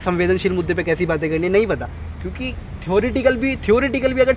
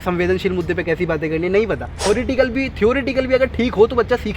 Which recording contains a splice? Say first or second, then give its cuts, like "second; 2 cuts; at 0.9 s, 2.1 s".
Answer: second; 1 cut; at 1.9 s